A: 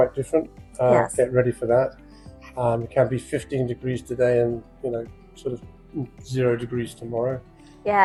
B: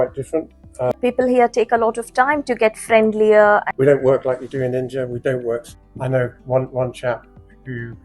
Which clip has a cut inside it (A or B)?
B